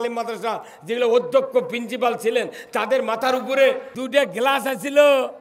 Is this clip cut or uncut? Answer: cut